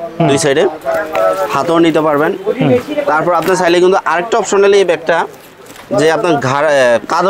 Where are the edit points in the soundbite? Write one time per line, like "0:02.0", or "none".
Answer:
none